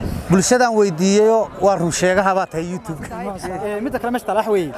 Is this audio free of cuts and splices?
no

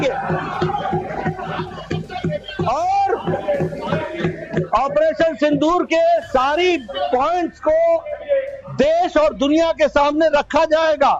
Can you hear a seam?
no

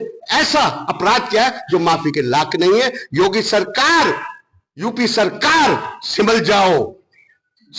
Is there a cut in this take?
no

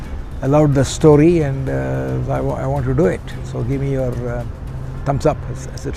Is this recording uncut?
yes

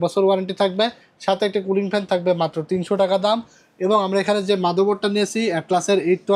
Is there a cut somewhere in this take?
no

